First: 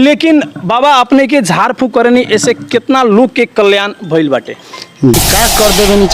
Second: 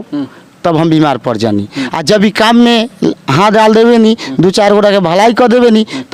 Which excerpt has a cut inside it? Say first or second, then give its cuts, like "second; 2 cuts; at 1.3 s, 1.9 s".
first; 1 cut; at 5.2 s